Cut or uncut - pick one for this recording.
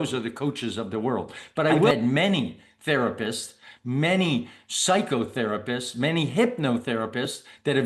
cut